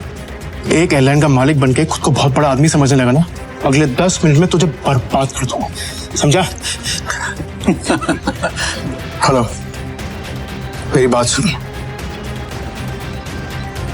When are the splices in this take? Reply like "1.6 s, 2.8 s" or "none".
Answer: 3.4 s, 8.7 s, 12.5 s

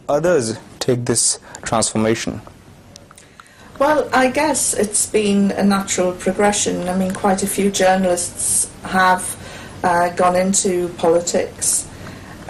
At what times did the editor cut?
10.5 s

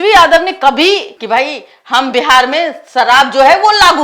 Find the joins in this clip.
1.1 s

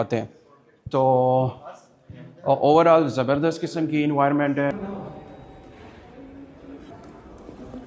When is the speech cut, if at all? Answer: 4.7 s, 6.9 s

